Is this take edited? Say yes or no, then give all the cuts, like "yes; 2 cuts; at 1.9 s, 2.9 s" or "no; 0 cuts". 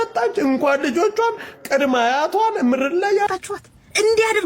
yes; 1 cut; at 3.3 s